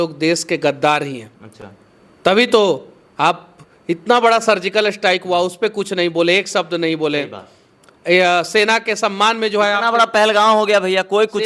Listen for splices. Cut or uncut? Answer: uncut